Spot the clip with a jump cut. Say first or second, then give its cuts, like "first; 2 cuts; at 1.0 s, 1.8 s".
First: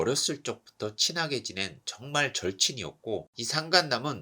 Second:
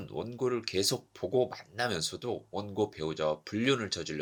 first; 1 cut; at 3.3 s